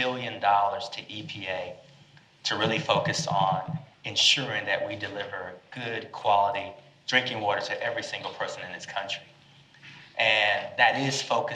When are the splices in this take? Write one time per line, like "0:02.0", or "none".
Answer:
none